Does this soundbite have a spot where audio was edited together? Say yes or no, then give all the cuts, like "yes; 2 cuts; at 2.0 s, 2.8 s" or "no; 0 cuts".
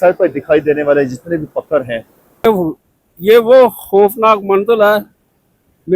yes; 1 cut; at 2.6 s